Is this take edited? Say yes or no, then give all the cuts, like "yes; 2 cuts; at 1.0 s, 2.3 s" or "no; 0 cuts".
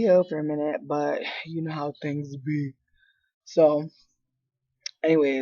no; 0 cuts